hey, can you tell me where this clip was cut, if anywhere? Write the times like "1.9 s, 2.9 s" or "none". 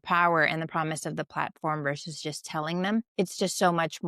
3.1 s